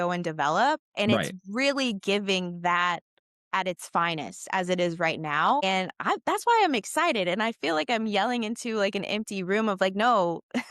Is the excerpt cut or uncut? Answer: cut